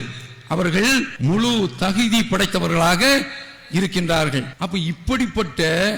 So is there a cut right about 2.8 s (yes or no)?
no